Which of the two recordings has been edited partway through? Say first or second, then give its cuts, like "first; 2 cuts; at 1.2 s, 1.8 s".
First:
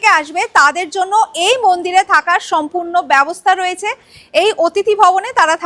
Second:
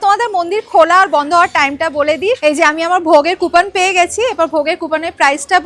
second; 1 cut; at 2.4 s